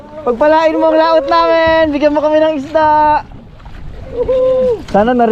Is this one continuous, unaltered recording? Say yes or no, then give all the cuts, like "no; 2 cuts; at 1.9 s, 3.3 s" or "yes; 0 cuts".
yes; 0 cuts